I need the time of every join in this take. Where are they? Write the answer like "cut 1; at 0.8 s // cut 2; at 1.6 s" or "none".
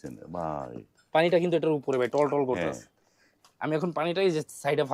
none

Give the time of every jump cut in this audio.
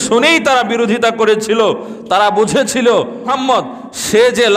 cut 1; at 3.3 s

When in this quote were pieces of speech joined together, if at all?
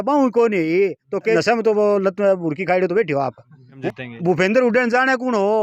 cut 1; at 1.4 s // cut 2; at 3.8 s

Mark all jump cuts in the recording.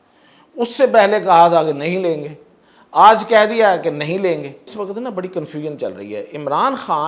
cut 1; at 4.7 s

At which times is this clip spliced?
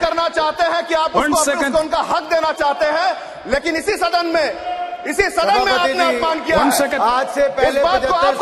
none

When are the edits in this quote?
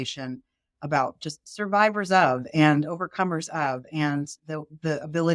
none

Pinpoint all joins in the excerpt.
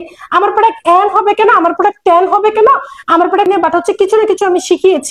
cut 1; at 3.5 s

